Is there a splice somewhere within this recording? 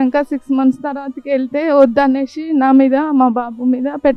no; 0 cuts

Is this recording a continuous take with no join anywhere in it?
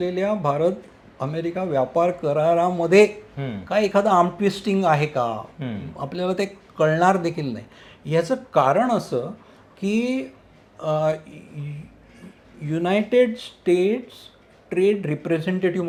yes; 0 cuts

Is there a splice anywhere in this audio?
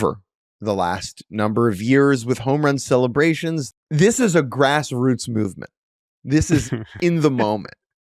yes; 1 cut; at 3.6 s

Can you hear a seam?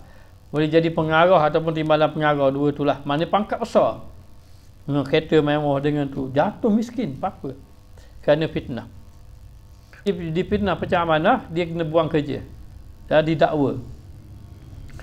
yes; 1 cut; at 10.1 s

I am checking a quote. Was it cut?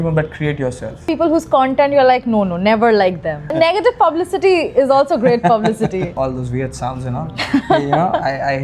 yes; 3 cuts; at 1.1 s, 3.5 s, 6.1 s

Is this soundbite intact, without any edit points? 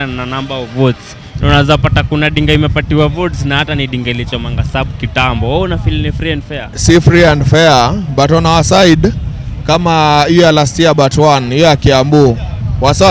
yes; 0 cuts

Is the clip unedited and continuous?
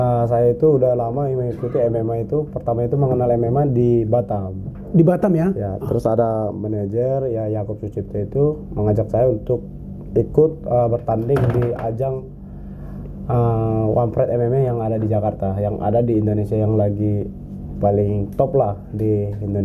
yes; 0 cuts

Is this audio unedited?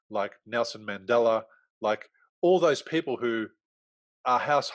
yes; 0 cuts

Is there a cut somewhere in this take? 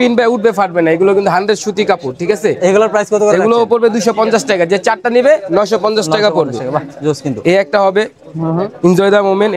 no; 0 cuts

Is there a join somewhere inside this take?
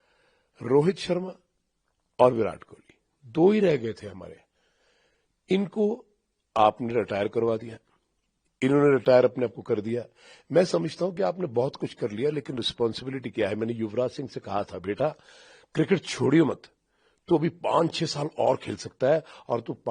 no; 0 cuts

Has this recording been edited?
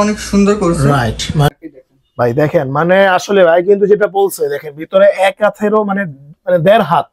yes; 1 cut; at 1.5 s

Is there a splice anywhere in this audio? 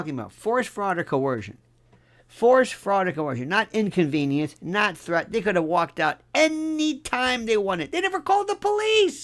no; 0 cuts

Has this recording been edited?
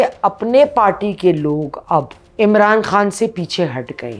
yes; 1 cut; at 2.2 s

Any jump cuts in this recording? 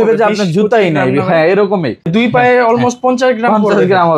yes; 1 cut; at 2.1 s

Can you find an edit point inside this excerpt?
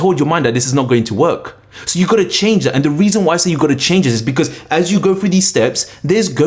no; 0 cuts

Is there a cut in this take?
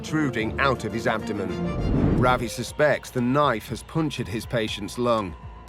yes; 1 cut; at 1.9 s

